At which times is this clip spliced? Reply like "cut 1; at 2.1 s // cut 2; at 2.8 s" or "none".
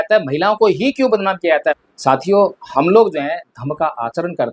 cut 1; at 1.8 s